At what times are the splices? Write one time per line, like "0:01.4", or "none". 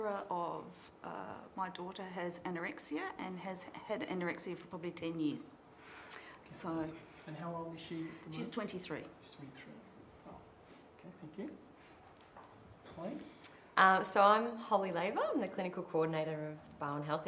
0:03.2